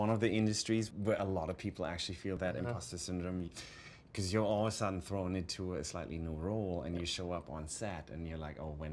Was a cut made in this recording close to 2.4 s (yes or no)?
yes